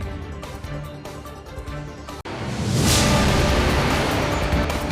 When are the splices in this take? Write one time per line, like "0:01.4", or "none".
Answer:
0:04.0

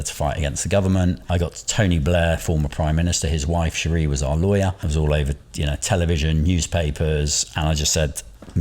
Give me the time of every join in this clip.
0:01.3
0:04.8

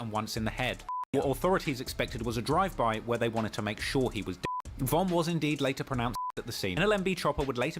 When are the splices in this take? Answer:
0:06.7

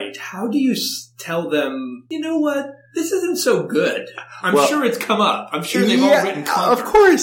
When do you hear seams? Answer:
0:02.0

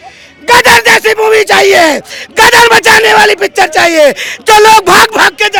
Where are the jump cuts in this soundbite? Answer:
none

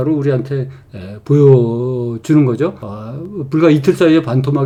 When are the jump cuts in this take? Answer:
none

